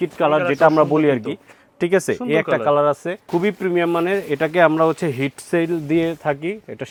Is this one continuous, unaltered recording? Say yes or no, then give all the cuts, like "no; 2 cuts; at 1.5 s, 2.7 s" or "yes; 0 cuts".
yes; 0 cuts